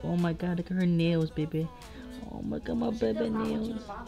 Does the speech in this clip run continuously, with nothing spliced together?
yes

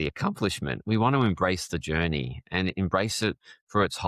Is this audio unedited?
yes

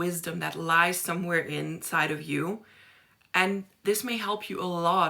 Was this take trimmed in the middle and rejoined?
no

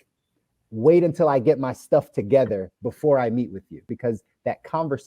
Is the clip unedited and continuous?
no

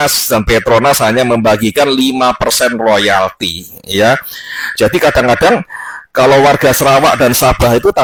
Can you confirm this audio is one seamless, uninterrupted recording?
yes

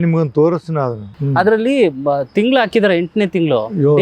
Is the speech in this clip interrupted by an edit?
yes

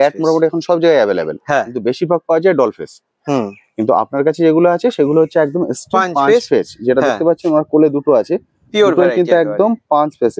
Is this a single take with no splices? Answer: yes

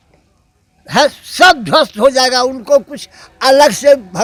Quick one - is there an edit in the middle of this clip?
no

